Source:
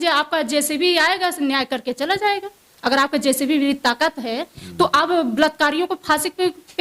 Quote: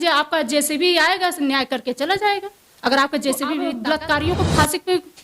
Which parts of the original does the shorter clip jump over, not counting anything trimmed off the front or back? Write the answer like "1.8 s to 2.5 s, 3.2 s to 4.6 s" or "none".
3.7 s to 5.2 s